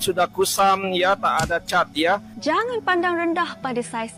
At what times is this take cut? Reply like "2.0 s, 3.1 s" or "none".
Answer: 2.3 s